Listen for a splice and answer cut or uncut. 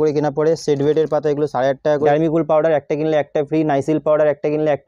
cut